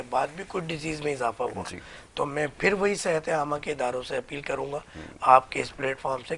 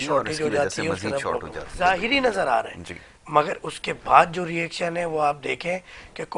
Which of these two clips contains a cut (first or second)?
second